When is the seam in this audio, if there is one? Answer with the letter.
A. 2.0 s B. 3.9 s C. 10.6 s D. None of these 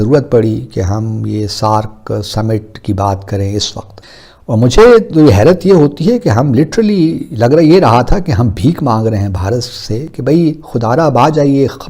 B